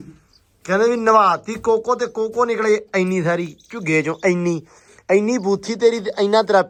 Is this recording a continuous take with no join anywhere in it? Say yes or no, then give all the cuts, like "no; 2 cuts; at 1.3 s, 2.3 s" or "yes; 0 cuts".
yes; 0 cuts